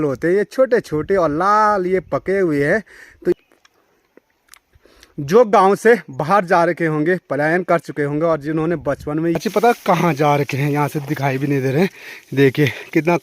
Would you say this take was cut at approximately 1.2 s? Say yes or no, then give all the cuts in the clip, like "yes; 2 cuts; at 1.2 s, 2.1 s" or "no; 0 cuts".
no; 2 cuts; at 3.3 s, 9.4 s